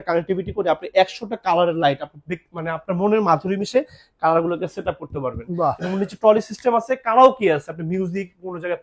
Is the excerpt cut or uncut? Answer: uncut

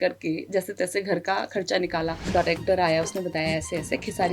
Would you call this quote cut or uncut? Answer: cut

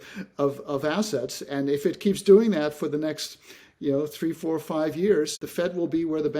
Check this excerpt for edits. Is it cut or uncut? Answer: cut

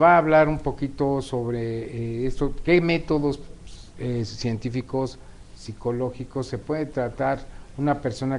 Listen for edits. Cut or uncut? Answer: cut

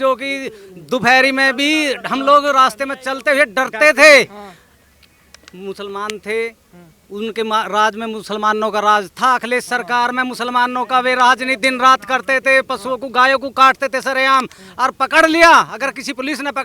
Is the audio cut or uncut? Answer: uncut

